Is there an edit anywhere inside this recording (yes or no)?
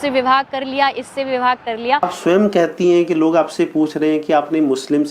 yes